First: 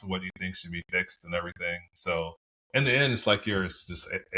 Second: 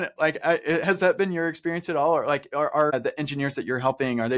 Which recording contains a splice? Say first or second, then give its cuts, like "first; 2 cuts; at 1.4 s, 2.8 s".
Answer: second; 1 cut; at 2.9 s